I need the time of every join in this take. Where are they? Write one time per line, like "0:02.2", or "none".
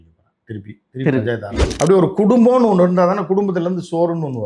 0:01.6